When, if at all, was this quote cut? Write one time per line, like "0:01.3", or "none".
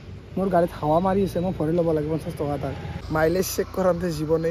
0:02.9